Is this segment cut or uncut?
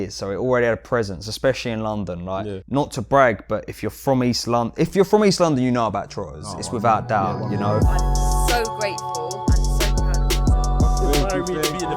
cut